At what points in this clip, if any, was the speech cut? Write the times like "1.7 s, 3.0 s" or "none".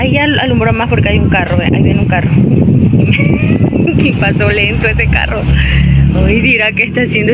none

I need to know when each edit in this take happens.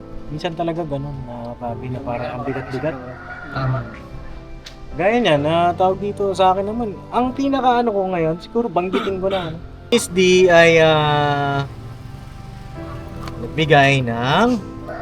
9.9 s

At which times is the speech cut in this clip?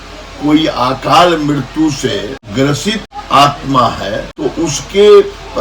2.4 s, 3.1 s, 4.3 s

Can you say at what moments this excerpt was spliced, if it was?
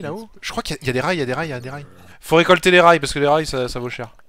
2.2 s

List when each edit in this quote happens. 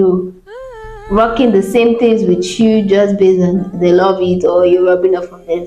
none

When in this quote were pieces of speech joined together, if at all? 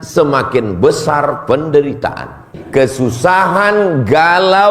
2.5 s

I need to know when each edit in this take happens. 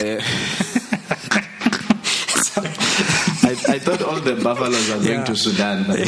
none

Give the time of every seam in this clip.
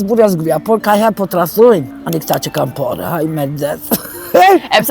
1.9 s

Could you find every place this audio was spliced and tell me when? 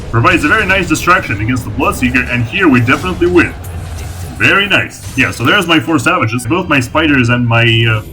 5.0 s, 6.4 s

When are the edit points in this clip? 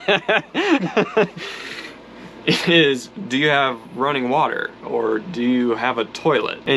none

